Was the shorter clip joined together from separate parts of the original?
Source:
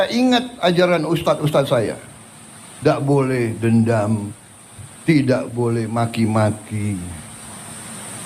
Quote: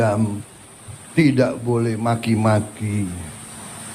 no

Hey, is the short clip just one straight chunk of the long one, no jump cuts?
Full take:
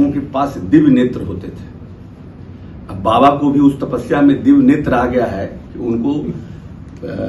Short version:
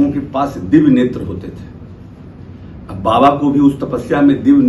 yes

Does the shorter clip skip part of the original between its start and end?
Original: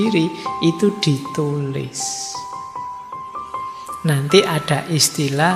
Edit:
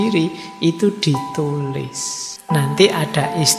yes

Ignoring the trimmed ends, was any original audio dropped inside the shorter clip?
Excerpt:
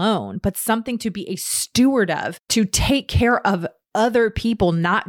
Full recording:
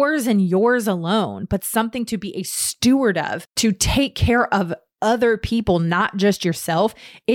no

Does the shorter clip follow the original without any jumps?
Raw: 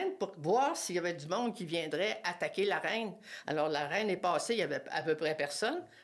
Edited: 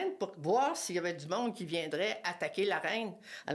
yes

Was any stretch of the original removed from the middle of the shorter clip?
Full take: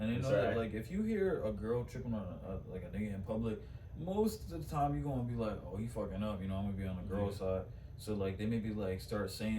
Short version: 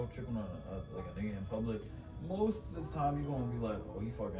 no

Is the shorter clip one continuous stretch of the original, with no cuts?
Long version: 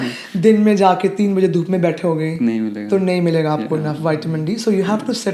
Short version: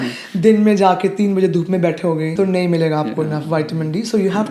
no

